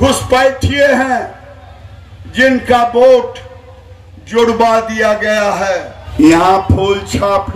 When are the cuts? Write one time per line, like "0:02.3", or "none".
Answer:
0:06.0